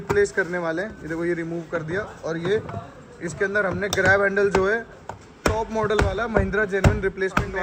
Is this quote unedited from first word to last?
yes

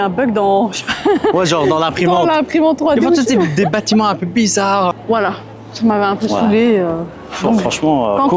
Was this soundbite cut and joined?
yes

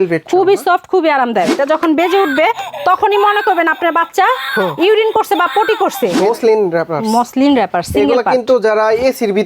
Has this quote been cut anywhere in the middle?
yes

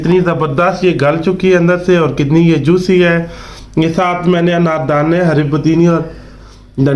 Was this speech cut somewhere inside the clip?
no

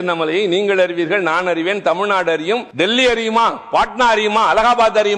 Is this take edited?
yes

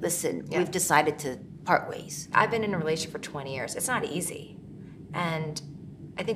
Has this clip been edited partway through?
no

